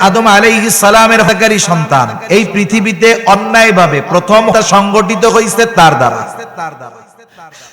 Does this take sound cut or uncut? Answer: cut